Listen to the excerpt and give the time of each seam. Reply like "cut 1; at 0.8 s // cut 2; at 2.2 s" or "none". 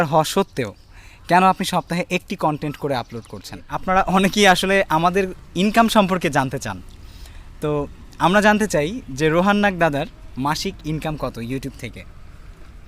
cut 1; at 3.7 s